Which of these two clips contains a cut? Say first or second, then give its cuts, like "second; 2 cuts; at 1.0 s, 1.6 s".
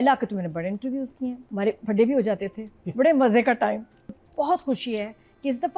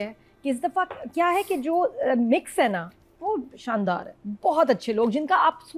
first; 2 cuts; at 1.4 s, 4.0 s